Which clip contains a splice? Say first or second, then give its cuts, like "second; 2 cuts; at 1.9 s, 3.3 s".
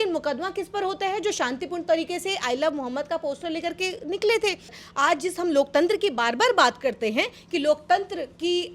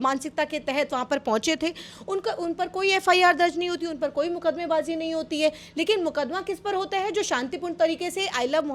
first; 1 cut; at 4.8 s